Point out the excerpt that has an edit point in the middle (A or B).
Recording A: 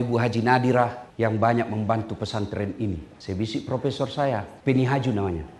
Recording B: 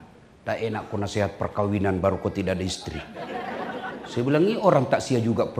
A